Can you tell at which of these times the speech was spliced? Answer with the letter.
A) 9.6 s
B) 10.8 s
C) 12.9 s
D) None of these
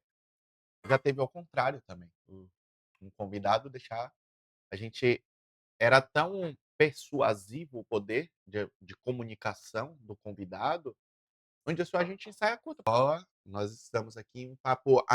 C